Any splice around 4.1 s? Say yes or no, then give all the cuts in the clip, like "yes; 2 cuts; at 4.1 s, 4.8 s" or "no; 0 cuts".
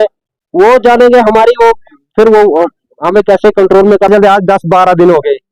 yes; 1 cut; at 4.1 s